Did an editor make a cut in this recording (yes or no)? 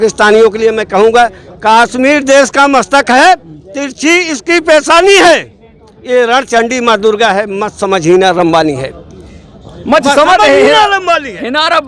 no